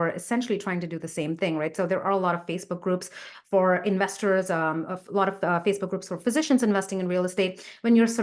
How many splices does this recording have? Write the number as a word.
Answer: zero